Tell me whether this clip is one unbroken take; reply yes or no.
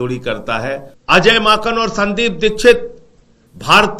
no